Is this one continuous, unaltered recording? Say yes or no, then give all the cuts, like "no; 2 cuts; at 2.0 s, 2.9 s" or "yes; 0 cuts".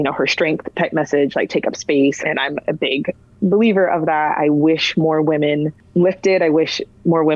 no; 2 cuts; at 2.2 s, 5.8 s